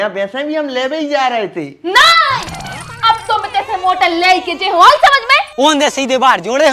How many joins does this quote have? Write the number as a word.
one